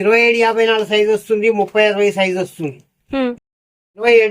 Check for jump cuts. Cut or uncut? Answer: cut